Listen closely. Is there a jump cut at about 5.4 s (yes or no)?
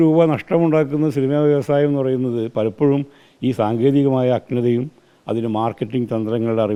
no